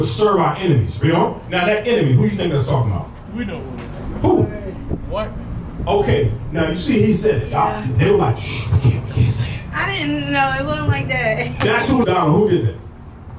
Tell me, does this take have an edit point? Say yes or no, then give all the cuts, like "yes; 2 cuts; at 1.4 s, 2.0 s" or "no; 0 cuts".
yes; 1 cut; at 12.1 s